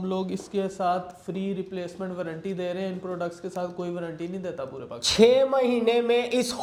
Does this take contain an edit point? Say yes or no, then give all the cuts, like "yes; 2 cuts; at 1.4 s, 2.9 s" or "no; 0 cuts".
no; 0 cuts